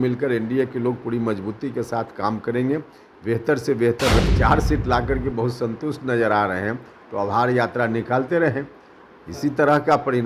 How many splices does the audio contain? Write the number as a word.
one